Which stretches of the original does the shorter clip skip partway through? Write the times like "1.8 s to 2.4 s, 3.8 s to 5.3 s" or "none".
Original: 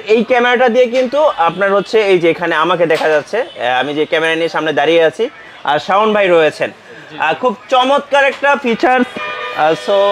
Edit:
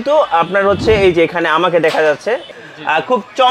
3.5 s to 6.8 s